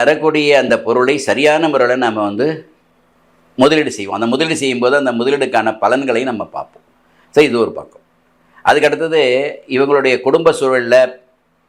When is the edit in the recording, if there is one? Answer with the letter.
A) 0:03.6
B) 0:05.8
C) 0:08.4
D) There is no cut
D